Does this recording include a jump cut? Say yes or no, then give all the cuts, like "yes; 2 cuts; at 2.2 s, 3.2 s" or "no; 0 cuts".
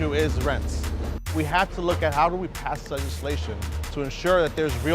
yes; 1 cut; at 1.0 s